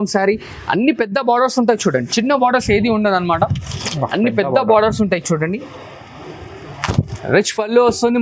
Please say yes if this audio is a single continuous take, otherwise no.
yes